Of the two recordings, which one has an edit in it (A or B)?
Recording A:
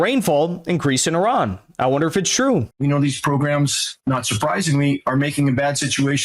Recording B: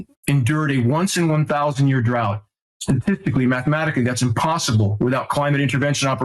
A